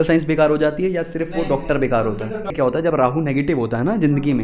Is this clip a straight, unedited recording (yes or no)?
no